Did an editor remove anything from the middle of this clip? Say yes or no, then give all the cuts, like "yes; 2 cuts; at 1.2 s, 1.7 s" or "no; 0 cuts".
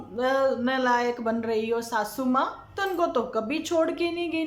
yes; 1 cut; at 2.7 s